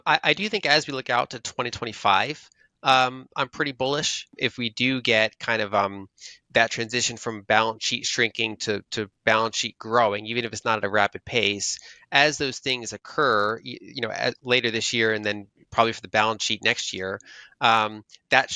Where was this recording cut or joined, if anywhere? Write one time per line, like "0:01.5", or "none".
0:04.3